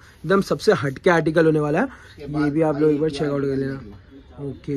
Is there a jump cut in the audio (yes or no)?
no